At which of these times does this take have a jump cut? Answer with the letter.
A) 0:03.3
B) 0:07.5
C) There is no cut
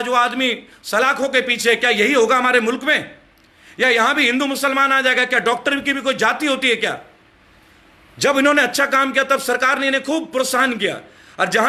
C